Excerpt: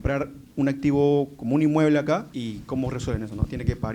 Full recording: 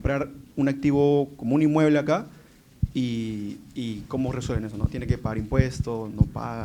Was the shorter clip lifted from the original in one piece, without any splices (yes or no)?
no